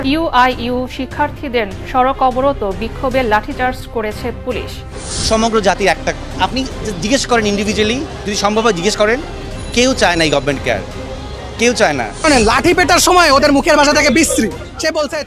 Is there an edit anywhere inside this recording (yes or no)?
no